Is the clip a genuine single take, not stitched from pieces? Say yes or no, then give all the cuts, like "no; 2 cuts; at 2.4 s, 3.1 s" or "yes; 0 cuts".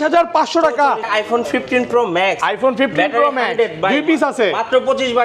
no; 1 cut; at 1.0 s